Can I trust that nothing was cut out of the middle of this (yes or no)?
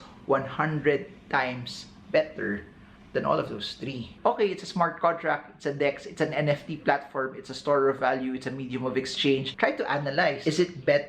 no